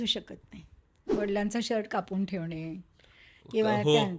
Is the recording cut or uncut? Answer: cut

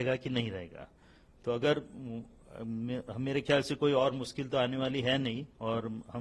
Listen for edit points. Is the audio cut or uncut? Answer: uncut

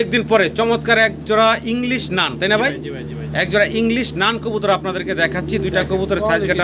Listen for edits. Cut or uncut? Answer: uncut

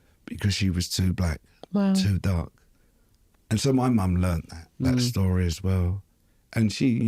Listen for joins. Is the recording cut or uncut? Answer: cut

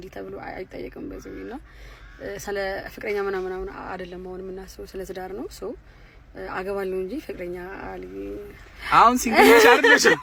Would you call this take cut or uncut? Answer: uncut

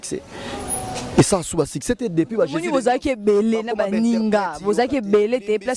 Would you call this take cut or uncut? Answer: uncut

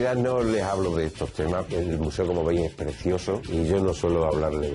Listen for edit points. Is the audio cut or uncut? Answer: cut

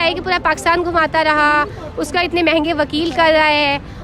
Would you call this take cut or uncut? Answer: uncut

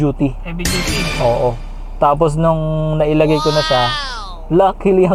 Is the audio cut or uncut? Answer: uncut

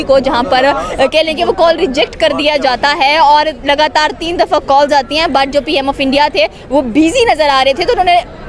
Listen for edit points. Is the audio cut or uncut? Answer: uncut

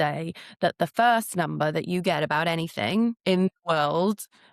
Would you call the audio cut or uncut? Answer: cut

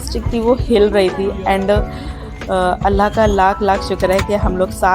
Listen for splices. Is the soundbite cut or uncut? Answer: uncut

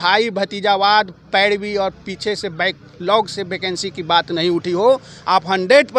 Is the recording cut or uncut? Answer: uncut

